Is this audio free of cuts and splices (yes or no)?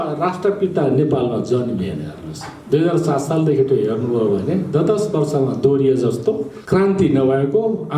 no